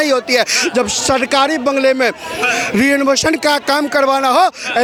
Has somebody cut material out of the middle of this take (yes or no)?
no